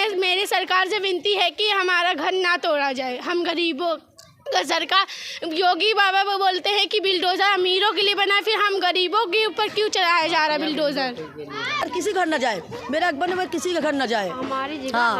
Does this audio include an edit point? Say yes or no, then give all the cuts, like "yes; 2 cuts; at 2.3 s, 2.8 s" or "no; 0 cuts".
no; 0 cuts